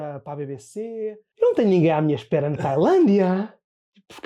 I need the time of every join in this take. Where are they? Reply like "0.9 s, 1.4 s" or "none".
1.2 s